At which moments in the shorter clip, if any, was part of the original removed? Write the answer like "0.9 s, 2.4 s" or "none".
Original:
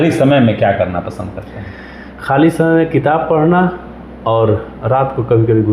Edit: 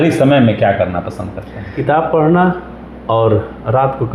1.8 s